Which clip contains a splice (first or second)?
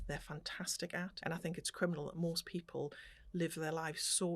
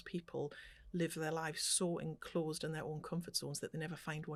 first